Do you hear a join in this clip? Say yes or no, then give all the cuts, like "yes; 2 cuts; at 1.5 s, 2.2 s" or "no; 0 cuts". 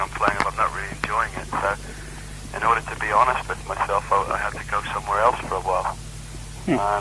no; 0 cuts